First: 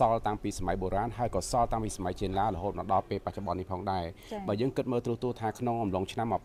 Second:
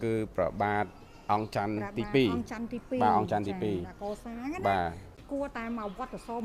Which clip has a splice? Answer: second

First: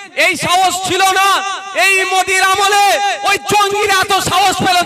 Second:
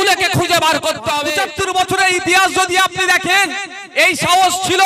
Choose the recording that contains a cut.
second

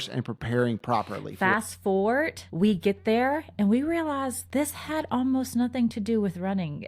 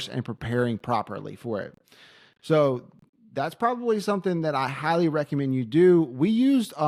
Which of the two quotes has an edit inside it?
first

